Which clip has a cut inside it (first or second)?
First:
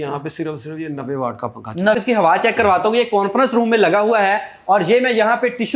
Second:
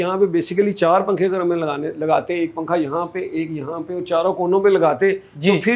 first